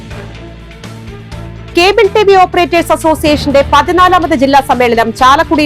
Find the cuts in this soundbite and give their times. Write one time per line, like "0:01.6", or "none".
0:01.0